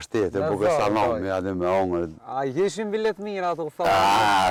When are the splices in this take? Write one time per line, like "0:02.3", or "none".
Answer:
none

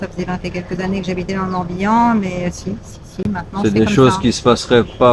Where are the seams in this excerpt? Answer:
none

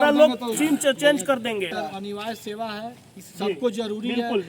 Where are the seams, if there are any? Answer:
0:01.7

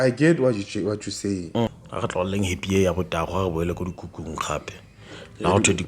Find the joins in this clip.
0:01.7

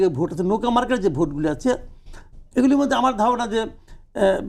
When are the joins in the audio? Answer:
none

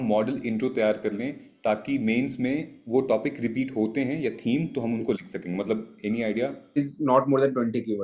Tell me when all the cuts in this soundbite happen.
0:06.8

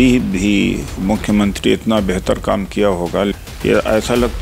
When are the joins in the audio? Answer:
0:03.3

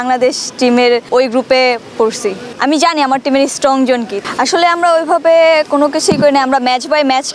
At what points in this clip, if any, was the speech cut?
0:01.1
0:02.5
0:04.2

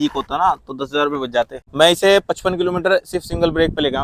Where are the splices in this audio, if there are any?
0:01.6

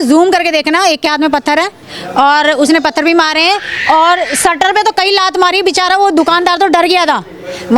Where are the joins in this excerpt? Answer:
none

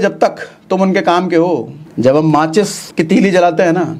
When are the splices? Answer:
0:01.8
0:02.8

